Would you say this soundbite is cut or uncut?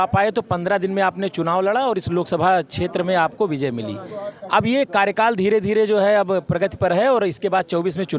uncut